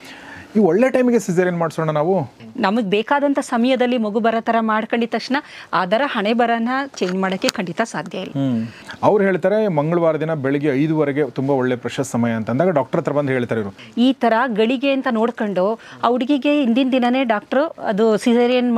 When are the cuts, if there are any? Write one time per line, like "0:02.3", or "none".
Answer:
0:02.4
0:08.8
0:13.8